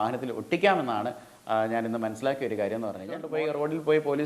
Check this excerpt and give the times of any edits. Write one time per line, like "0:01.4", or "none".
0:03.3